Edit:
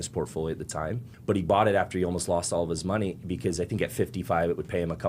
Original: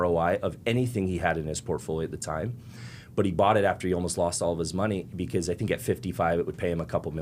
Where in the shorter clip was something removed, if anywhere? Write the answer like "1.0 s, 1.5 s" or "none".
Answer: 1.1 s